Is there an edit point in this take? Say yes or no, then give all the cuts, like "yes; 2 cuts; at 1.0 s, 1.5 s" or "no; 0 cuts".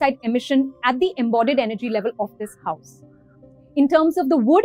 no; 0 cuts